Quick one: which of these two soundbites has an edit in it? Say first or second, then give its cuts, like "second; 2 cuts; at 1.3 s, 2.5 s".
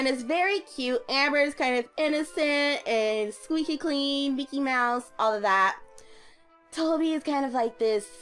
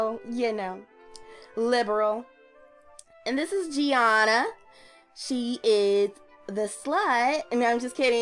first; 1 cut; at 4.4 s